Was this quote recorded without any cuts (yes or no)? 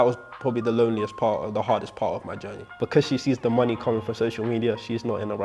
no